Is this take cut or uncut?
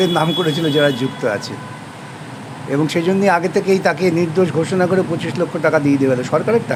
uncut